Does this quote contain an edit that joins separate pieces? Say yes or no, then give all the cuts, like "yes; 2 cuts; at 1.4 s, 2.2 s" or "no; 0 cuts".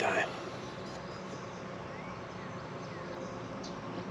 yes; 1 cut; at 3.2 s